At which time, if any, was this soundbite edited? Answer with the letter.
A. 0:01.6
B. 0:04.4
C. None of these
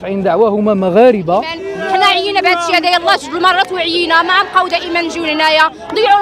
A